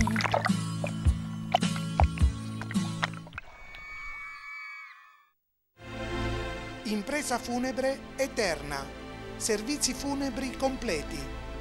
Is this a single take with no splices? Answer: no; 1 cut; at 5.2 s

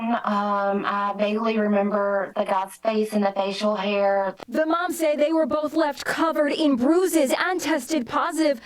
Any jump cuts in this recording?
yes; 1 cut; at 3.5 s

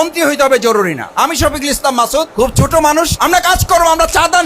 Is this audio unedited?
no; 2 cuts; at 2.3 s, 3.1 s

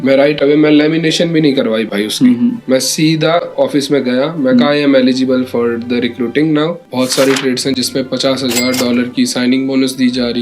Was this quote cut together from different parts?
yes; 1 cut; at 6.8 s

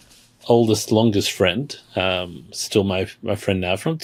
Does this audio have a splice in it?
no; 0 cuts

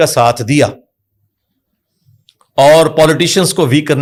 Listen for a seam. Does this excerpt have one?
no; 0 cuts

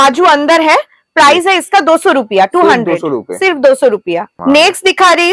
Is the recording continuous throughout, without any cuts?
yes; 0 cuts

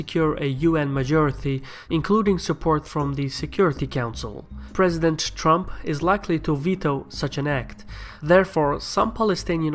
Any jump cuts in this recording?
yes; 1 cut; at 5.7 s

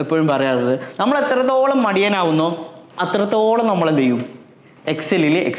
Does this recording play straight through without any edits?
yes; 0 cuts

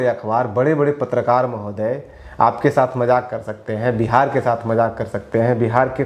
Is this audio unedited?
yes; 0 cuts

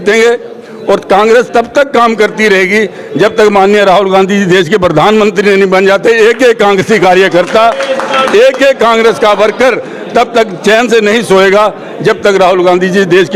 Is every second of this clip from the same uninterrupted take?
yes; 0 cuts

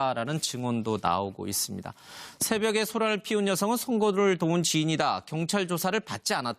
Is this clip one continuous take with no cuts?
no; 1 cut; at 3.4 s

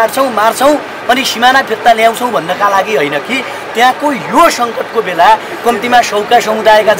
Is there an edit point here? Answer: no; 0 cuts

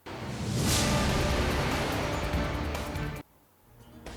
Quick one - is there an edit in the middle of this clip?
no; 0 cuts

